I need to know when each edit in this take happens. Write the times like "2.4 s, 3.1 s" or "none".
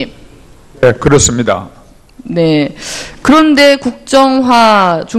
1.2 s